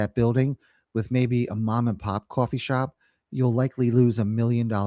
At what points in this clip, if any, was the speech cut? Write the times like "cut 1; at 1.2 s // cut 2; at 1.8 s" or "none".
none